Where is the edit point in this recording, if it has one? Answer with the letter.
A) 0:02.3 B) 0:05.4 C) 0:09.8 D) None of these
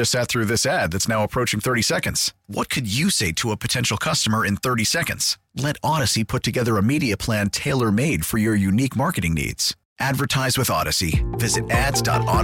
D